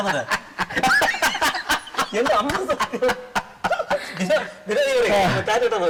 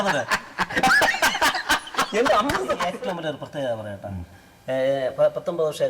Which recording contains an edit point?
second; 1 cut; at 2.9 s

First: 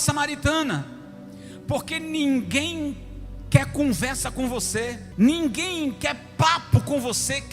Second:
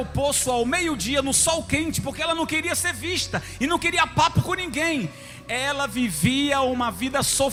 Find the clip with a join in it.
first; 1 cut; at 5.0 s

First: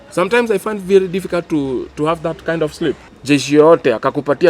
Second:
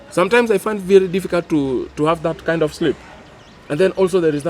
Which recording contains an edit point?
first; 1 cut; at 3.1 s

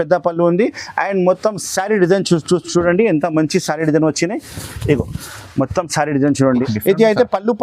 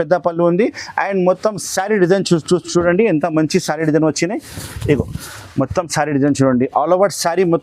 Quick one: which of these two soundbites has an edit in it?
first; 1 cut; at 6.7 s

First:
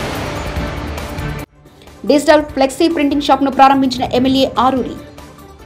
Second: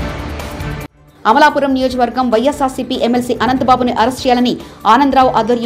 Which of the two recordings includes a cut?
first; 1 cut; at 1.4 s

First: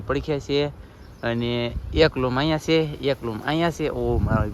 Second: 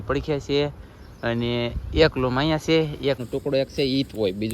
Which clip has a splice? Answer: second; 1 cut; at 3.2 s

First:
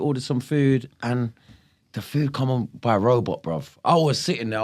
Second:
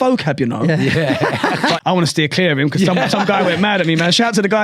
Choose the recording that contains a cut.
second; 1 cut; at 1.8 s

